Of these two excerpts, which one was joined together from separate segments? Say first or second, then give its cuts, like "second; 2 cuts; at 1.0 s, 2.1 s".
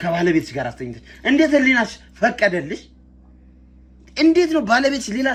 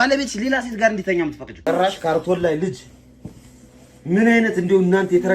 second; 1 cut; at 1.6 s